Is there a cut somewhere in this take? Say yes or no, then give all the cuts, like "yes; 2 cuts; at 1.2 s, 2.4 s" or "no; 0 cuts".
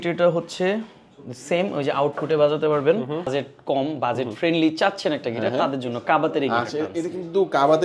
yes; 1 cut; at 3.3 s